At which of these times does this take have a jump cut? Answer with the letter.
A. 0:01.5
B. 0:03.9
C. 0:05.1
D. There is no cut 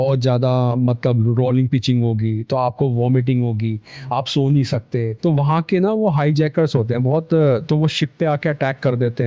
C